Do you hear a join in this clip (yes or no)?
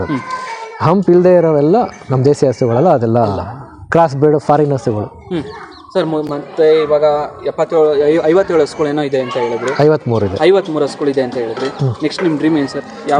no